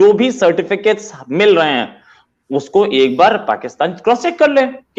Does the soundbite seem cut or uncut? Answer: uncut